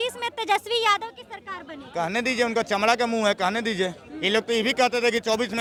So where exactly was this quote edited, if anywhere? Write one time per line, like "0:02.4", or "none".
none